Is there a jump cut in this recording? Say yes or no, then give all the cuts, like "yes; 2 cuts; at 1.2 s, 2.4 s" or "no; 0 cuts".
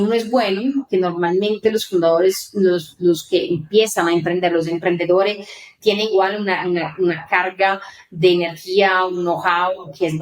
no; 0 cuts